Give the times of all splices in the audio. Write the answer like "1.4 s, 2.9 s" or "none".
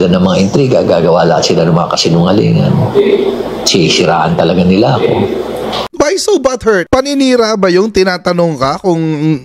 5.9 s